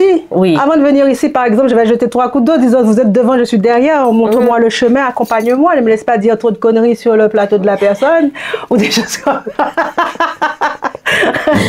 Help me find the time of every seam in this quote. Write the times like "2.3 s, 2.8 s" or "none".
none